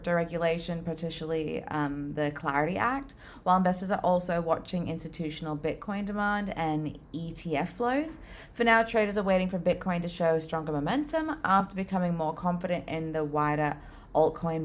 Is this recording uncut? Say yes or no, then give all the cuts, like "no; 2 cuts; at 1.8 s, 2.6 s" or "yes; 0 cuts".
yes; 0 cuts